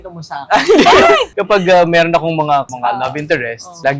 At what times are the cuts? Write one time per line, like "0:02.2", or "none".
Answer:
0:01.3
0:02.7